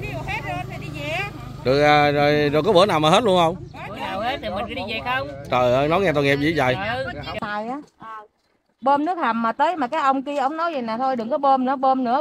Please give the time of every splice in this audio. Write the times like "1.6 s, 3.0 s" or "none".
7.4 s